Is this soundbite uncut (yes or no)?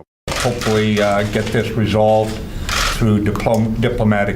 yes